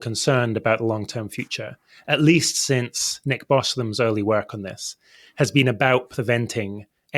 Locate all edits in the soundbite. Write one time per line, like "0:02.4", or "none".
none